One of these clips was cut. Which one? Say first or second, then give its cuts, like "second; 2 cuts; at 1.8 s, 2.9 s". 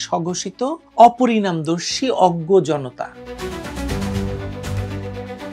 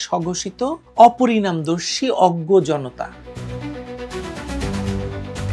first; 1 cut; at 3.2 s